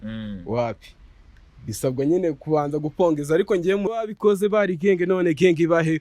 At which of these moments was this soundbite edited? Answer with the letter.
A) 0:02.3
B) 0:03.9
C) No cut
B